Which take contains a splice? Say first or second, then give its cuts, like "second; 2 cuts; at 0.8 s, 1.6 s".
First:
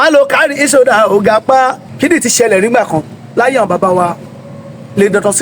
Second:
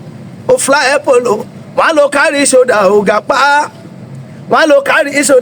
first; 1 cut; at 1.9 s